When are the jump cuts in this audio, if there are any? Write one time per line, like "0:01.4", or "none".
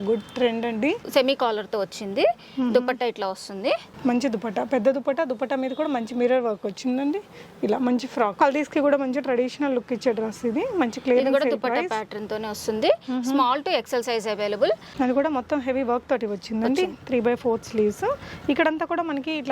0:01.0
0:03.9
0:08.3
0:14.9